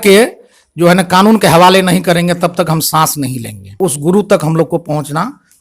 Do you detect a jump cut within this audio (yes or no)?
yes